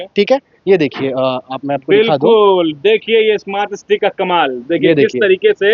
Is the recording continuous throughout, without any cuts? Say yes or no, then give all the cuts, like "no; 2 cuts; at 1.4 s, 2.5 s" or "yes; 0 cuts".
yes; 0 cuts